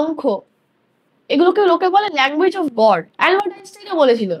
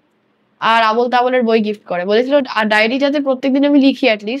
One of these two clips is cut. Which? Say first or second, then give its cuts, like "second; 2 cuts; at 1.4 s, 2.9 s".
first; 1 cut; at 3.1 s